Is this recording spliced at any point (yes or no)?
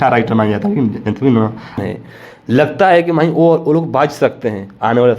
yes